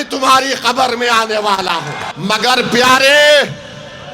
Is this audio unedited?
no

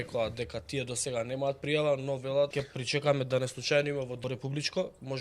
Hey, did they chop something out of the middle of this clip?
yes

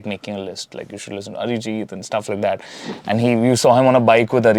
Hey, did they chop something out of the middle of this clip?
no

